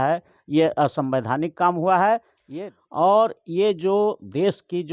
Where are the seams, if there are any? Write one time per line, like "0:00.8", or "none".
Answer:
0:02.4

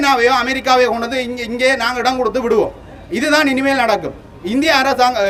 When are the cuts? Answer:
none

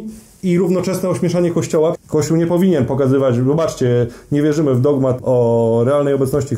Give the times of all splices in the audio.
0:02.0
0:05.2

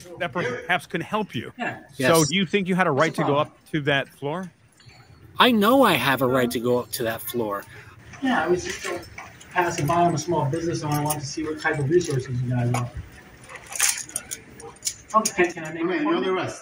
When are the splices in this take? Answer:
none

